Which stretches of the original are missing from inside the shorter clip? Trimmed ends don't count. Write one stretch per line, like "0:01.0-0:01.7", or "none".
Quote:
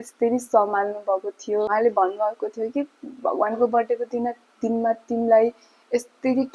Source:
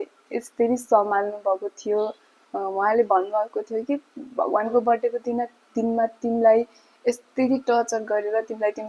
0:02.1-0:02.8